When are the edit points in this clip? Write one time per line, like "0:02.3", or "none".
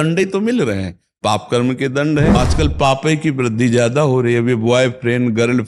0:02.4